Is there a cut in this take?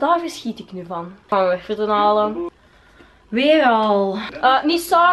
yes; 1 cut; at 1.3 s

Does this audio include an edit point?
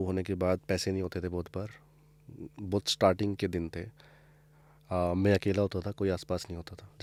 no; 0 cuts

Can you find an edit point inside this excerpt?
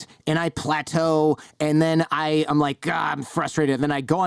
no; 0 cuts

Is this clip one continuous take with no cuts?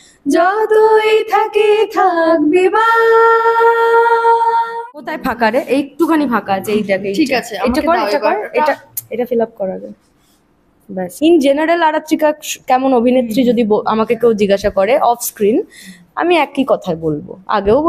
no; 2 cuts; at 4.7 s, 11.1 s

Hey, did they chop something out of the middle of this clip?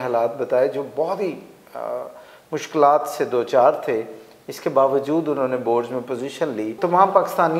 yes; 1 cut; at 6.7 s

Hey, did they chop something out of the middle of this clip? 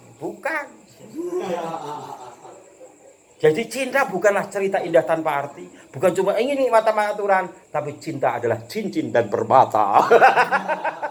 no; 0 cuts

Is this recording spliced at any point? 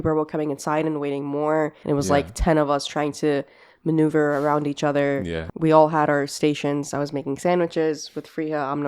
yes; 2 cuts; at 1.8 s, 5.4 s

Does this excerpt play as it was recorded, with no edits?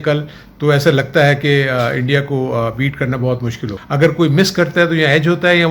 no; 1 cut; at 3.7 s

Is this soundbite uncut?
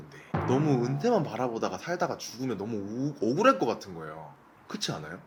yes; 0 cuts

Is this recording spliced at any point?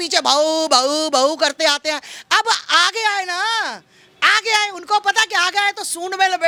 no; 0 cuts

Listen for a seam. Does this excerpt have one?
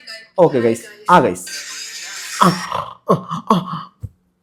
no; 0 cuts

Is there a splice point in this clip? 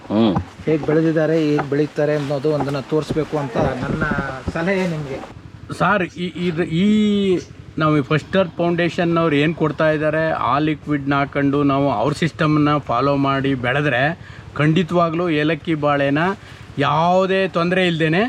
yes; 1 cut; at 5.3 s

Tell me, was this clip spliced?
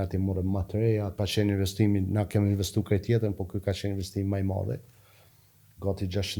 yes; 1 cut; at 1.2 s

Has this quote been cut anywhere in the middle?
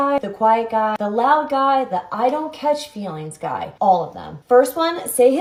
no; 0 cuts

